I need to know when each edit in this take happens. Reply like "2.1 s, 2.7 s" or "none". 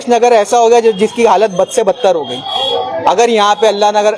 none